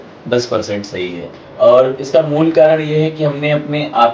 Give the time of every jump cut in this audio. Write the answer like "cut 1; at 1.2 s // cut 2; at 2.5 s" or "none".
cut 1; at 1.4 s